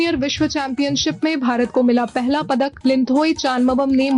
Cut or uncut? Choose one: cut